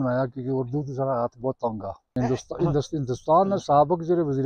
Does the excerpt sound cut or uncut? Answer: cut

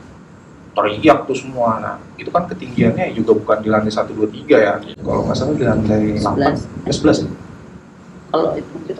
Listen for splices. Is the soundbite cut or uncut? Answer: uncut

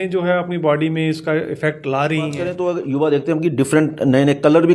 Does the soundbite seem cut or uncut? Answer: cut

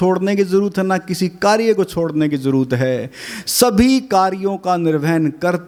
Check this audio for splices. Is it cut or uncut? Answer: uncut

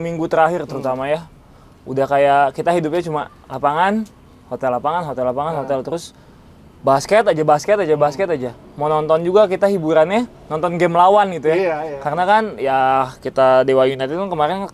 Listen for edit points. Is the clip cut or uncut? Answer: uncut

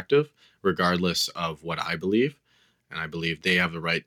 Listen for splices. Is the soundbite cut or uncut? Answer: cut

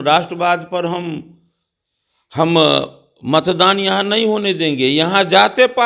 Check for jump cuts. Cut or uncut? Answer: uncut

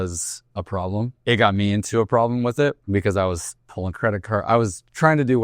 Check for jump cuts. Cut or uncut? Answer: cut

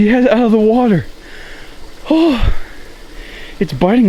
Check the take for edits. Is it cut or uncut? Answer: uncut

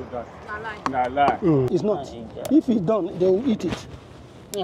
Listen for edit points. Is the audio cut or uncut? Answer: cut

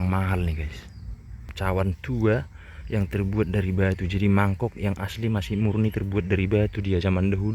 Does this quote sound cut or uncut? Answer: cut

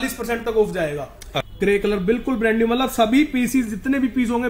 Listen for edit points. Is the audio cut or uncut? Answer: cut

